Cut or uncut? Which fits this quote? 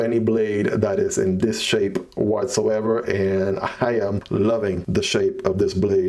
uncut